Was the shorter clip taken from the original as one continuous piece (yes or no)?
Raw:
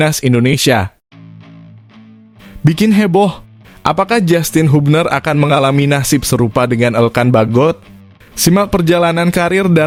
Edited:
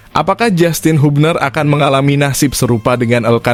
yes